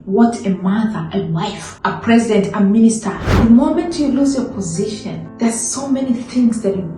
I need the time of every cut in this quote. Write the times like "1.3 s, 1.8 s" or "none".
1.7 s, 3.4 s, 5.2 s